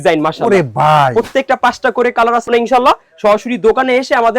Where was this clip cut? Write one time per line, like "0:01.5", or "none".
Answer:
0:02.5

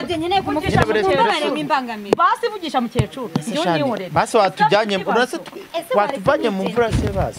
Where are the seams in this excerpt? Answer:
none

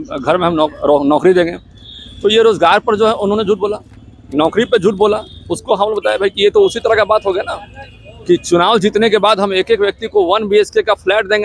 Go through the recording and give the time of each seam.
none

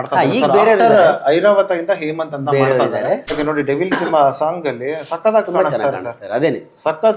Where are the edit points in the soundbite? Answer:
0:03.4

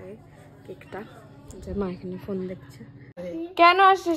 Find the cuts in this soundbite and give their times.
0:03.2

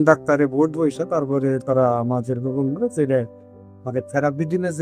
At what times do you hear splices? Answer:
none

